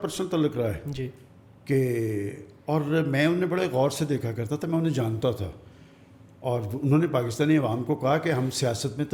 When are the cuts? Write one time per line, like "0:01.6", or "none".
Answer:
none